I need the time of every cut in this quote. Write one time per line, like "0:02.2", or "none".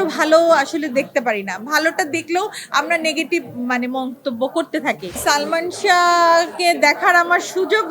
0:05.1